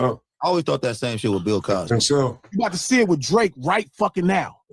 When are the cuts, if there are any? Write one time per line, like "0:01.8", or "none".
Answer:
none